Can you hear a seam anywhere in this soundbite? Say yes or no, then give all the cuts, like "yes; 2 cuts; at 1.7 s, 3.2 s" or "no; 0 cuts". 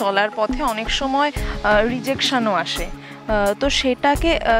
no; 0 cuts